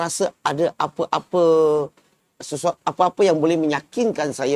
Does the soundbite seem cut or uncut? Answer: uncut